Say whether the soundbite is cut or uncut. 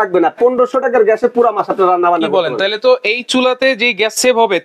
uncut